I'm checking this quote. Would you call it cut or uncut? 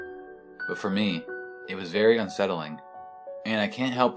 uncut